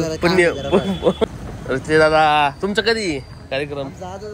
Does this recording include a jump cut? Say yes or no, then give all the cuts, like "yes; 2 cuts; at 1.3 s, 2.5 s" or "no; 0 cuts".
yes; 1 cut; at 1.3 s